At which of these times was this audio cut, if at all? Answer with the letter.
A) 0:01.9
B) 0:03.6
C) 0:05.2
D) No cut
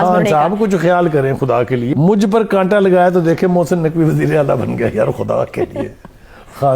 A